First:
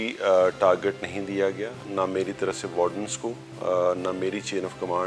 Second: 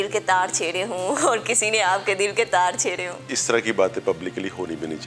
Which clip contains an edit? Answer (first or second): second